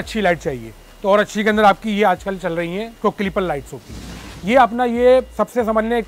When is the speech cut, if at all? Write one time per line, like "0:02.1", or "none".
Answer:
0:04.3